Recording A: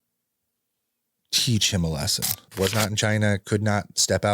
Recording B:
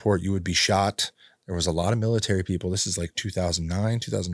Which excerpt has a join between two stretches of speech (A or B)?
A